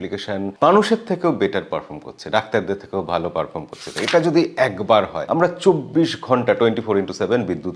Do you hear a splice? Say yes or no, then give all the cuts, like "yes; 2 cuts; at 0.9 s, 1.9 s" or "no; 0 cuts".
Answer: yes; 1 cut; at 3.9 s